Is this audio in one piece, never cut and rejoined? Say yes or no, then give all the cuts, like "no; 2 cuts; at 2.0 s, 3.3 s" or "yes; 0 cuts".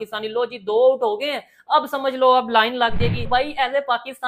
no; 1 cut; at 3.3 s